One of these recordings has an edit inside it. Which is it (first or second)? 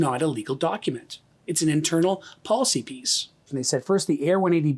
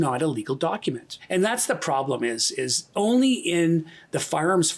second